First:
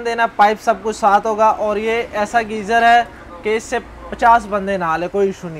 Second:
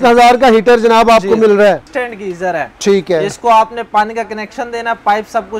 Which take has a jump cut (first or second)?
second